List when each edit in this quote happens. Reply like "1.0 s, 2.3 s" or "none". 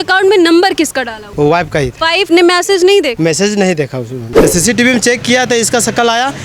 1.2 s, 2.1 s, 3.1 s, 4.2 s